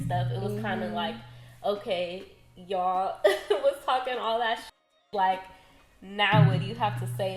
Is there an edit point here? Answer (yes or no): no